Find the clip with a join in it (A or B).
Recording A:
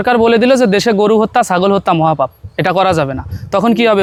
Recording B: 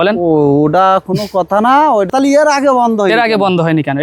B